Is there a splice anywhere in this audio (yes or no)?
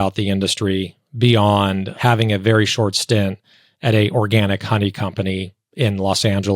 yes